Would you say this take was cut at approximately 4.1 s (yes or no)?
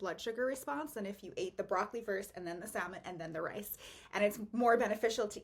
no